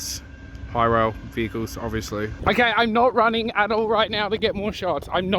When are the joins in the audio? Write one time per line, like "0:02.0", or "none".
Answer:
0:02.3